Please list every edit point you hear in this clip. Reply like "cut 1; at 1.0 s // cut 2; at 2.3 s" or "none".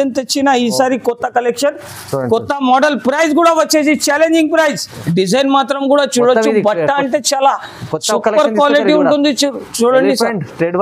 cut 1; at 4.9 s